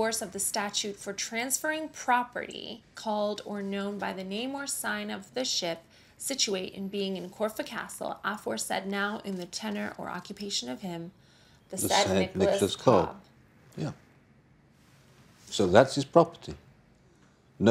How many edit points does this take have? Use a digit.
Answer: 0